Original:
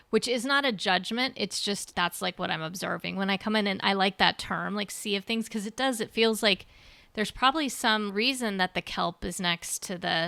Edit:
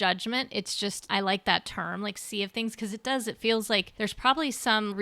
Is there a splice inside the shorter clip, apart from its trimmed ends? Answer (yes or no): yes